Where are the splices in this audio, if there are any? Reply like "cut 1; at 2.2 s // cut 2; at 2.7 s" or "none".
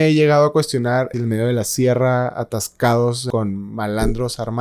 cut 1; at 1.1 s // cut 2; at 3.2 s

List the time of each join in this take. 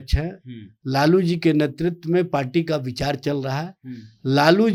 none

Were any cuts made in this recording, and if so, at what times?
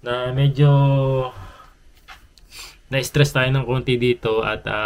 none

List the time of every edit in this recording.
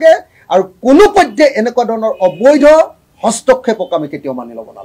cut 1; at 3.0 s

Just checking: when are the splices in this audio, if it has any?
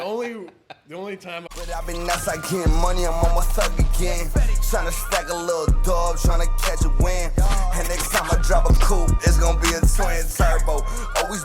cut 1; at 1.5 s

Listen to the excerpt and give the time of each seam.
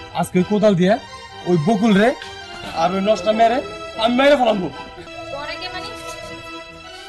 cut 1; at 5.0 s

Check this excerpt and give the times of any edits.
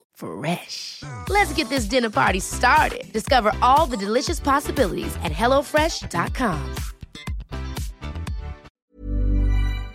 cut 1; at 8.6 s

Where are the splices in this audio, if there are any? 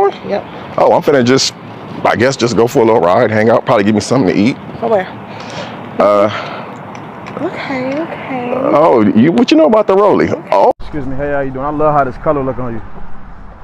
cut 1; at 10.7 s

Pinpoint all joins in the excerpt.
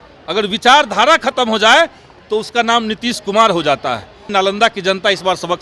cut 1; at 4.3 s

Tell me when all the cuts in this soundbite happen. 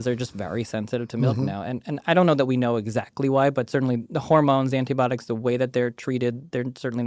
none

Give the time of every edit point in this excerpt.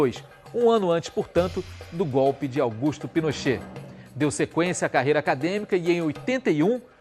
cut 1; at 1.5 s

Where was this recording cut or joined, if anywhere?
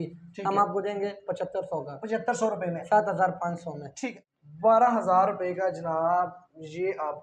cut 1; at 4.0 s

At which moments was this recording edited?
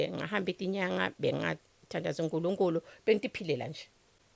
none

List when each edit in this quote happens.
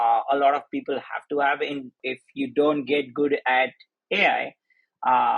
cut 1; at 2.0 s

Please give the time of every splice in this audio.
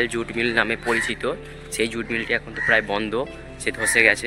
none

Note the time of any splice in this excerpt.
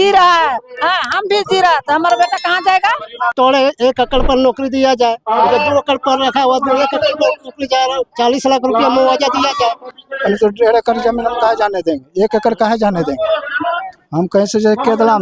cut 1; at 3.3 s // cut 2; at 9.9 s

